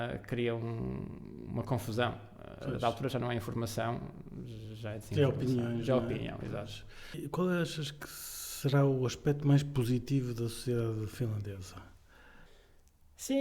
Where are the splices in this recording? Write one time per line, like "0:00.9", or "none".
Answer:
0:07.2
0:12.5